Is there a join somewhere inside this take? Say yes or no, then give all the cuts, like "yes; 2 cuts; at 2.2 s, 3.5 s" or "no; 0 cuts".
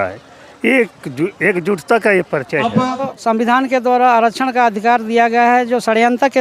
yes; 1 cut; at 3.1 s